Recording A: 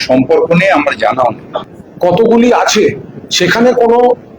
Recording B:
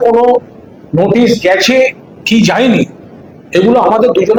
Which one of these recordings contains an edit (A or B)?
A